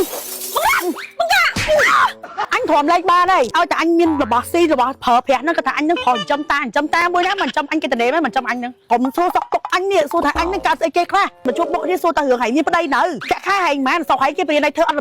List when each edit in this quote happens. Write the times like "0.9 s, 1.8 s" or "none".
2.3 s, 3.5 s, 8.8 s, 11.4 s, 13.2 s